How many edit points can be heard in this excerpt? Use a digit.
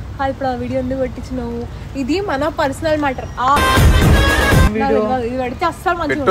1